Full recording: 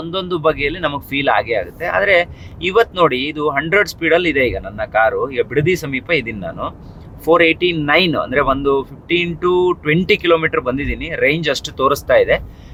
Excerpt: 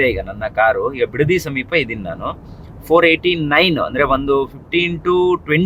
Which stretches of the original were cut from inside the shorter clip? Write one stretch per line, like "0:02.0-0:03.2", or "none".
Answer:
none

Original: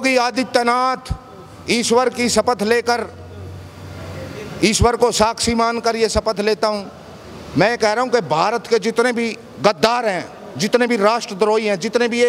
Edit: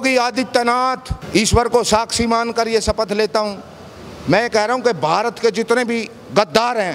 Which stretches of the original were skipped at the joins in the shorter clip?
0:01.1-0:04.4

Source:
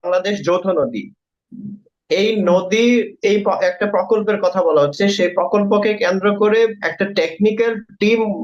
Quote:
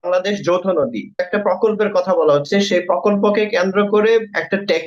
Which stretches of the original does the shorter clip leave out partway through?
0:01.3-0:03.7

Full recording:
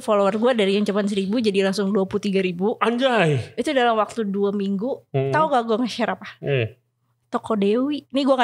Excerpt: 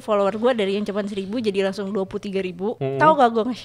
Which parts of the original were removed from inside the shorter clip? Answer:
0:02.8-0:05.1

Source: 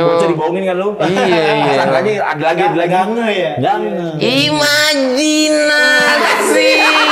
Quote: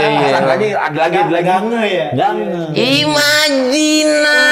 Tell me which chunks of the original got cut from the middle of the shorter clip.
none

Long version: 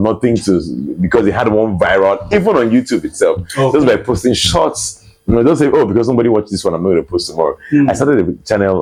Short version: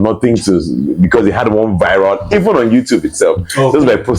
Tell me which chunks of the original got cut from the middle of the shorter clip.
none

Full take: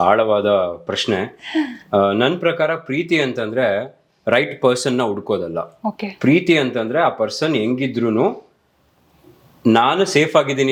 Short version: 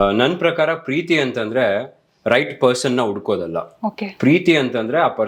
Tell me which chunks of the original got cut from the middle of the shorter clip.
none

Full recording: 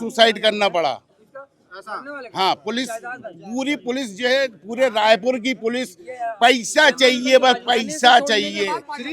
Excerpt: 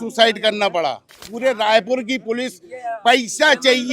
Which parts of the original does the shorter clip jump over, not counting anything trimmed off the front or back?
0:01.3-0:04.6

